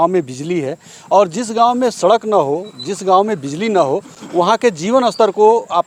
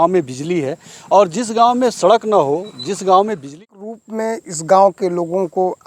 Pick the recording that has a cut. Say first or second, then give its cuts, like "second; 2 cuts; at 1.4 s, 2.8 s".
second; 1 cut; at 3.6 s